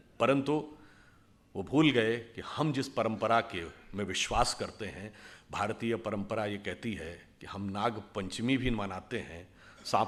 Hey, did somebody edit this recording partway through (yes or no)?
no